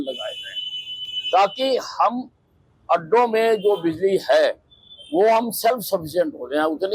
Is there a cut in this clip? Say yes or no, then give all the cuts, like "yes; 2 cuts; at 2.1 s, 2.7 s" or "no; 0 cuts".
no; 0 cuts